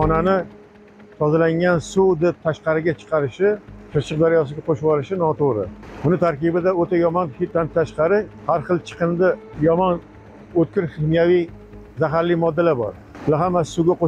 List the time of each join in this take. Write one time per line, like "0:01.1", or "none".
0:03.7
0:05.8
0:07.5
0:08.3
0:09.5
0:13.1